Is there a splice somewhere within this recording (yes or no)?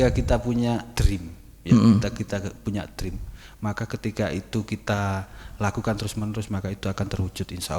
no